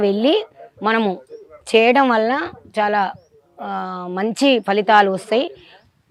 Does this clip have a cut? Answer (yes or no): no